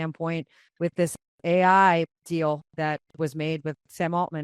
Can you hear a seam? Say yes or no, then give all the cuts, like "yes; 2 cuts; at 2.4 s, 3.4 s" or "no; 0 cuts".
no; 0 cuts